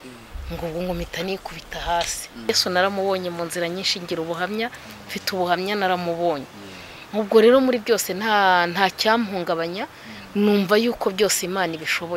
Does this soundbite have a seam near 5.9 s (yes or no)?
no